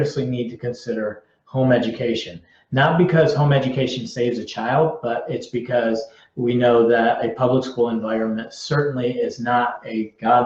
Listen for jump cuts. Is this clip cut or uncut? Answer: uncut